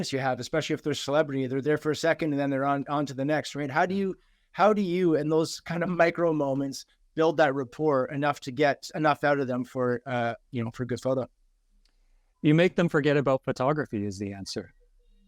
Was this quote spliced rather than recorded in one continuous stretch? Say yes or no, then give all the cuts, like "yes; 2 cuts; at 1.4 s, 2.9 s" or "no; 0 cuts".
no; 0 cuts